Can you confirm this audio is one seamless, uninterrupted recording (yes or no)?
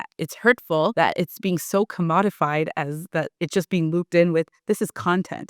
no